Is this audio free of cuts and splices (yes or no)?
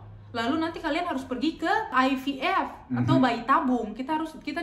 no